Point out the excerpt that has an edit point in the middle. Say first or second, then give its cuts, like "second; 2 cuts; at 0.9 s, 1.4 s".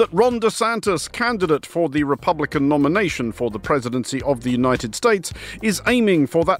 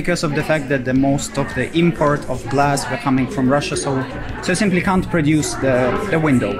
first; 1 cut; at 1.1 s